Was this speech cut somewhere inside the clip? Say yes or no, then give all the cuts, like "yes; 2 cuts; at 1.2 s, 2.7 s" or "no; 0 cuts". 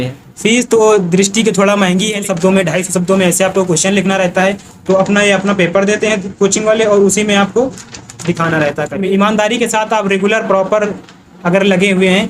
yes; 2 cuts; at 2.2 s, 8.9 s